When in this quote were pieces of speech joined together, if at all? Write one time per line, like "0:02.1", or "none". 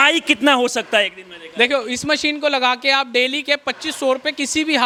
none